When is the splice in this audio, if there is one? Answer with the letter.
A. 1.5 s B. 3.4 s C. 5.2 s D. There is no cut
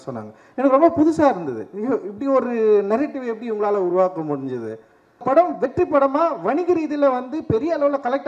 C